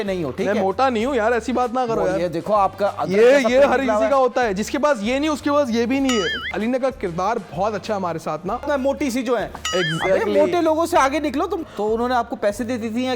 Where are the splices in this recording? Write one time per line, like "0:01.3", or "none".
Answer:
0:06.5
0:08.6
0:11.6